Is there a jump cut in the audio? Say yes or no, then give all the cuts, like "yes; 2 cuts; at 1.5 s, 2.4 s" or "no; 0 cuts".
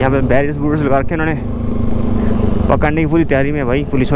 no; 0 cuts